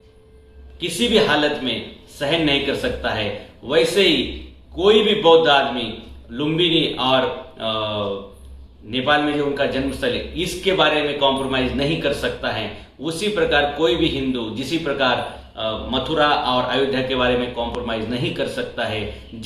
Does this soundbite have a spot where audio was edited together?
no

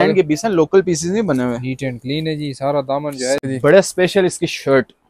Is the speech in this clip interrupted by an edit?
yes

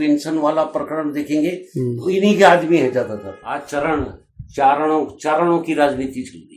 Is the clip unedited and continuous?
no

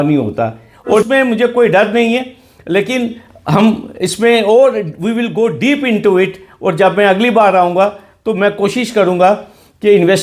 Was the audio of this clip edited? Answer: yes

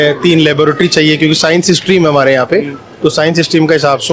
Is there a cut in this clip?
no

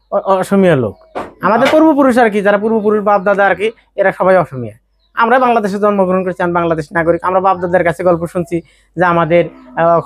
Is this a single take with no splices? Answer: yes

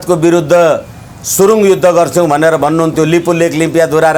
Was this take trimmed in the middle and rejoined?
no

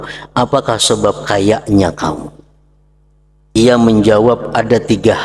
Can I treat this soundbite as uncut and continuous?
no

